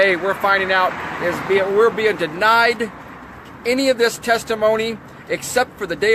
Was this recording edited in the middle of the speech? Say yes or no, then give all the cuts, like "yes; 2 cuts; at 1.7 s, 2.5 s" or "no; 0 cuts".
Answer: yes; 1 cut; at 1.9 s